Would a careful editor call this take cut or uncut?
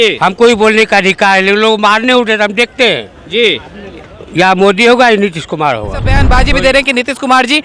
cut